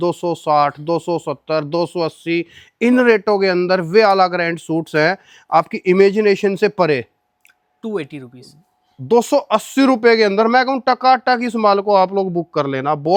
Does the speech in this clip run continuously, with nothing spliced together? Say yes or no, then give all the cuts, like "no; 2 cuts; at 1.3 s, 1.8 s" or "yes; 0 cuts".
yes; 0 cuts